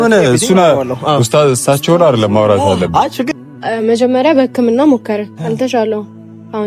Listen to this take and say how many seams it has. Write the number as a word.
one